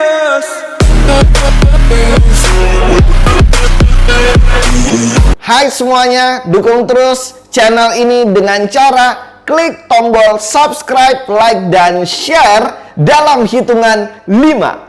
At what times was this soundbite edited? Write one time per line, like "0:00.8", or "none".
0:05.3